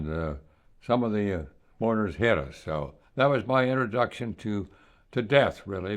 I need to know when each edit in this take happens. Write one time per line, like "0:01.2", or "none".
0:01.6
0:03.0